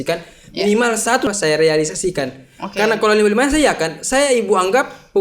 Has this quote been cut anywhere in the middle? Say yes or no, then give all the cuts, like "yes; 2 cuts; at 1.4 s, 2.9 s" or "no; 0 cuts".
yes; 1 cut; at 1.3 s